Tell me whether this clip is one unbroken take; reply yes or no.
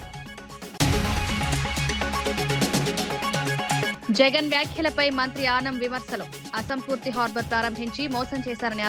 no